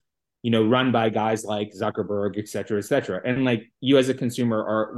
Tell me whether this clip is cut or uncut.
uncut